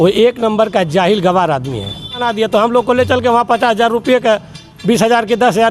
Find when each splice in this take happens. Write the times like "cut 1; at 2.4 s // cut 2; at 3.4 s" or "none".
cut 1; at 2.3 s